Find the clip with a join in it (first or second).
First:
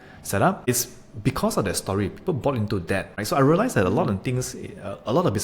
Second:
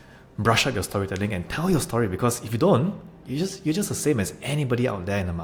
first